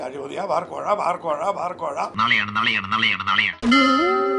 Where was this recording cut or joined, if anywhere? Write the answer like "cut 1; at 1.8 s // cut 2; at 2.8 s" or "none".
cut 1; at 3.5 s